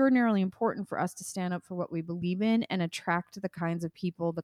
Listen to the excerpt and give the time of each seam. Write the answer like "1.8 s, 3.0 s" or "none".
none